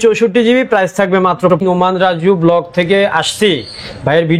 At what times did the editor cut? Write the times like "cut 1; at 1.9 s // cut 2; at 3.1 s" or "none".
cut 1; at 1.6 s